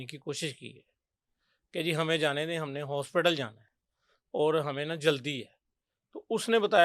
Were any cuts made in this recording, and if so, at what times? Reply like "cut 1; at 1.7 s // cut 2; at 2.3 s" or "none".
none